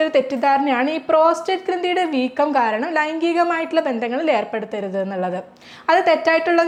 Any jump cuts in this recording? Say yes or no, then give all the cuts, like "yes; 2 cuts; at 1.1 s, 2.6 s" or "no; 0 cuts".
no; 0 cuts